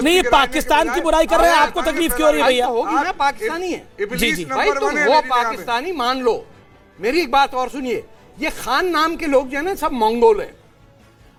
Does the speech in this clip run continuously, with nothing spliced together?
yes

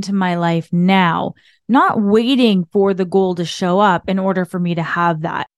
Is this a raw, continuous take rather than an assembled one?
yes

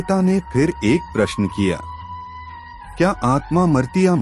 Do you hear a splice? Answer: no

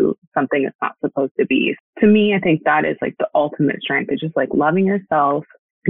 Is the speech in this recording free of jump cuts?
no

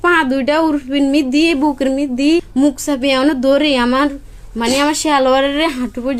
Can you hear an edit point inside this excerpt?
yes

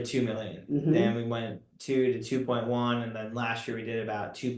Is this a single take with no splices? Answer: yes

